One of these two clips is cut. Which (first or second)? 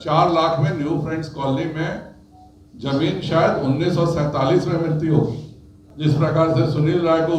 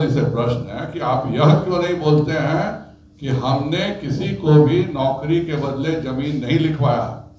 first